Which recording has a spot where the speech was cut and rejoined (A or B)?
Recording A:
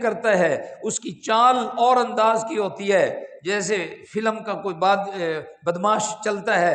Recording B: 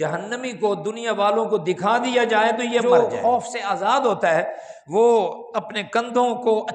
B